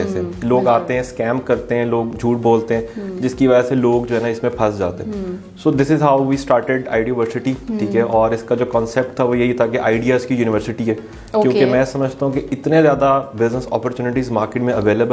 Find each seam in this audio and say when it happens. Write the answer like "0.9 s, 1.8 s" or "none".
none